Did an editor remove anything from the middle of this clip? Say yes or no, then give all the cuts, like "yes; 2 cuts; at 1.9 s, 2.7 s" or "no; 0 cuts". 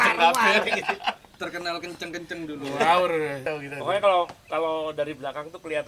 yes; 1 cut; at 3.5 s